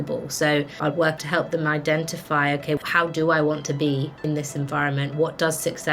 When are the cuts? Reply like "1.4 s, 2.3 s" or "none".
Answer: 1.1 s, 2.8 s, 4.2 s